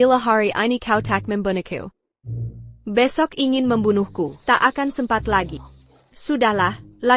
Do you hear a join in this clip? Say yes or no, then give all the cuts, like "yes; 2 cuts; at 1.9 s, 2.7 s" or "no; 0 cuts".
no; 0 cuts